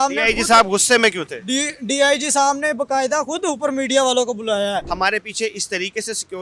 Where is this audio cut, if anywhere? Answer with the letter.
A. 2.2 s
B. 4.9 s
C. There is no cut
B